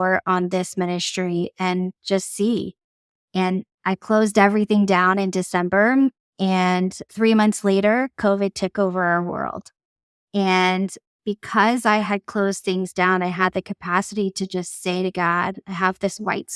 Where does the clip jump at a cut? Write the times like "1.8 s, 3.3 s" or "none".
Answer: none